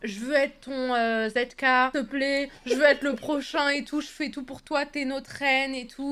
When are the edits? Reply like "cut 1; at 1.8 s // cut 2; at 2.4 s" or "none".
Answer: none